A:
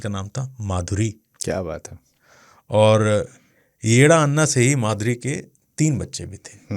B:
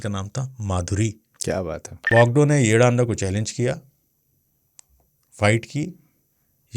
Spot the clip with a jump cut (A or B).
B